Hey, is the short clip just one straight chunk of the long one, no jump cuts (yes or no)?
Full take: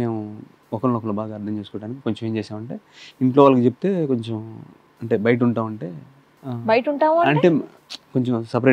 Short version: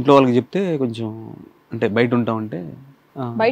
yes